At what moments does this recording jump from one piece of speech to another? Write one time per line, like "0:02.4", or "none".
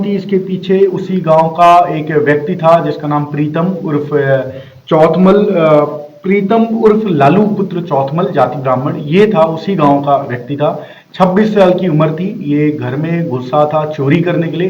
none

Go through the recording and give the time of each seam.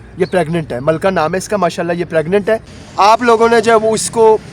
0:03.1

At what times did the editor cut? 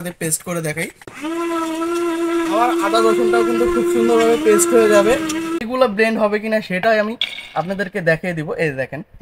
0:01.0
0:05.6

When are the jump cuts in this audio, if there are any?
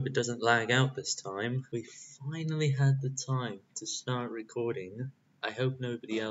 0:01.6

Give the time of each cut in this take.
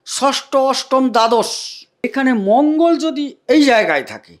0:02.1

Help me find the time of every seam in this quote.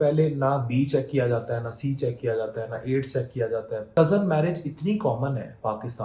0:03.9

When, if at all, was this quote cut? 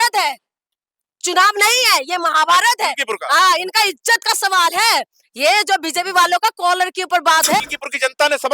0:07.6

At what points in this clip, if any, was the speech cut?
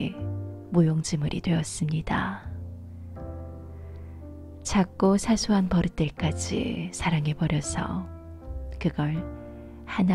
0:02.4
0:04.7

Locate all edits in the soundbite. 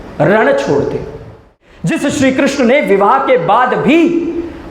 0:01.6

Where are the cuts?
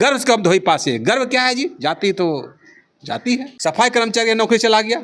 0:03.5

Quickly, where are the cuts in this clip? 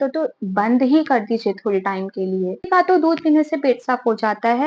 0:02.7

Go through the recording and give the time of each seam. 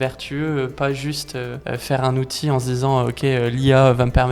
0:01.6

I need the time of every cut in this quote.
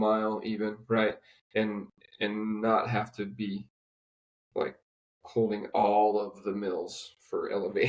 none

